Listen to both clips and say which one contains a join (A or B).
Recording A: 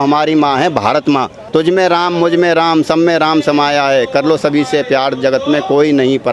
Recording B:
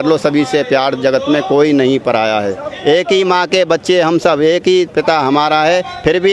A